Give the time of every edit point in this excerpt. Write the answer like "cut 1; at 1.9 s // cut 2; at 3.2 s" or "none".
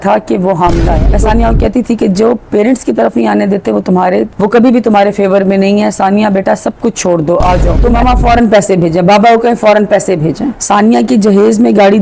cut 1; at 1.1 s // cut 2; at 7.9 s